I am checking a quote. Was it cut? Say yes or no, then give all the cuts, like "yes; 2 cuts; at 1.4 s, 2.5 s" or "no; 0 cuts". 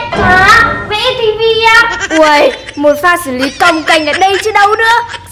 yes; 1 cut; at 2.0 s